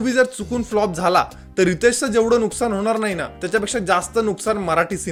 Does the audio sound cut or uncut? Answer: uncut